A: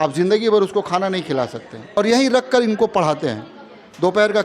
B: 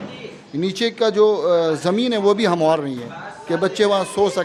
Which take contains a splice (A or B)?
A